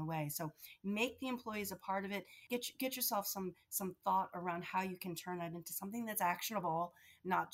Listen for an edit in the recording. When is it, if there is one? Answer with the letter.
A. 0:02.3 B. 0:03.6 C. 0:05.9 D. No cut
A